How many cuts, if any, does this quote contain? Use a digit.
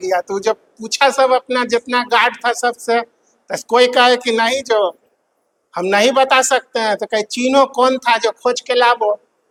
0